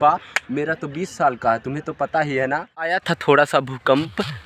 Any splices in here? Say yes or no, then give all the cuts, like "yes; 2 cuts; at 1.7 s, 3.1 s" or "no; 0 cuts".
yes; 1 cut; at 3.0 s